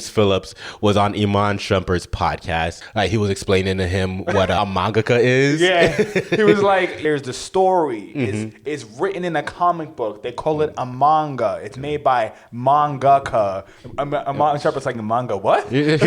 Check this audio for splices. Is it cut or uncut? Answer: cut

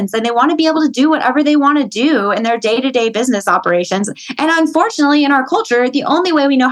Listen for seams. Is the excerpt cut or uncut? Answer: uncut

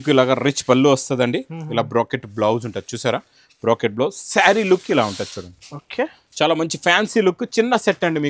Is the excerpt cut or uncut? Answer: uncut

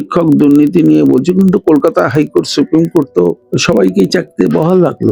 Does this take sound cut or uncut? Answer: uncut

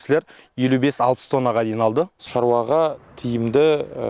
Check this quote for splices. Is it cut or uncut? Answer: cut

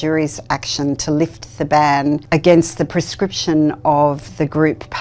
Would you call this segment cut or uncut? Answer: uncut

